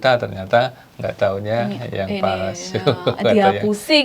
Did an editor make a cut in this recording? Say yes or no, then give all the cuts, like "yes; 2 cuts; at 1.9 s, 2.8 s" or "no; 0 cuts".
no; 0 cuts